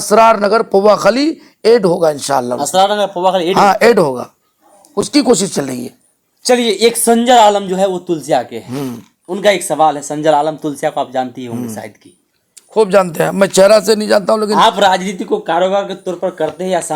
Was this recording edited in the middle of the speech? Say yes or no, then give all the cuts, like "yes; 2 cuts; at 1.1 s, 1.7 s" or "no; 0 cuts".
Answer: no; 0 cuts